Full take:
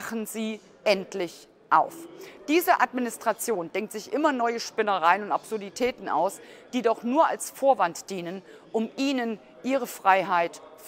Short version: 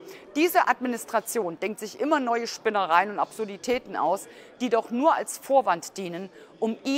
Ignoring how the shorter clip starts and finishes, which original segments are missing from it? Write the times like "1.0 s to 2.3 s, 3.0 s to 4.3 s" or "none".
none